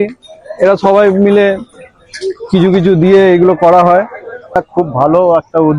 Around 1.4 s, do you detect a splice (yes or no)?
no